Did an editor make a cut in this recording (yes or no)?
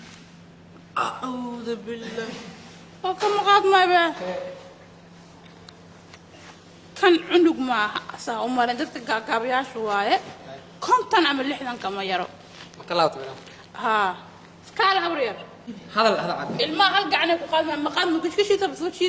yes